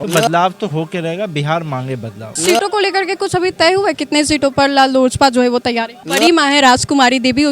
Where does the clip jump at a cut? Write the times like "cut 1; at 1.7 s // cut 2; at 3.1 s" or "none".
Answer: cut 1; at 2.2 s // cut 2; at 6.0 s